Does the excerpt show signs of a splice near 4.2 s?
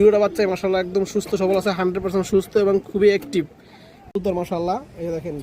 yes; 1 cut; at 4.2 s

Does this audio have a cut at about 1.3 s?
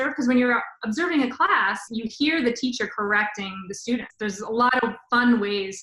no; 1 cut; at 4.1 s

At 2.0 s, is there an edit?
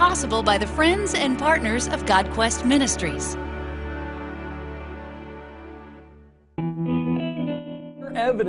no; 0 cuts

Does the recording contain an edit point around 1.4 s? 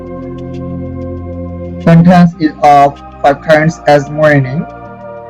yes; 1 cut; at 1.4 s

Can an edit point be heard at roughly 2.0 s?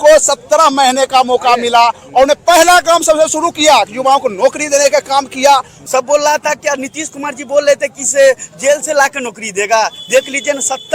no; 1 cut; at 5.7 s

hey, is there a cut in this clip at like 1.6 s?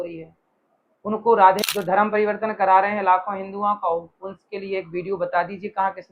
yes; 1 cut; at 1.6 s

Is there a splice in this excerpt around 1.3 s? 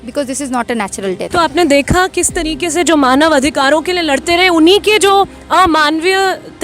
yes; 1 cut; at 1.3 s

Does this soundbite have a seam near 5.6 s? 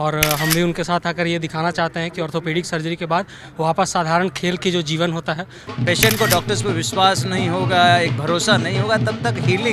yes; 1 cut; at 5.6 s

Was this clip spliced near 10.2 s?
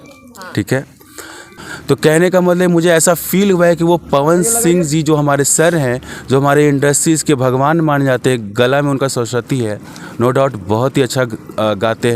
no; 1 cut; at 1.5 s

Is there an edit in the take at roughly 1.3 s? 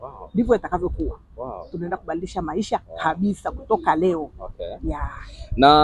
no; 0 cuts

